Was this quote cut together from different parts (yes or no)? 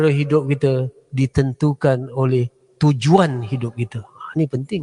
no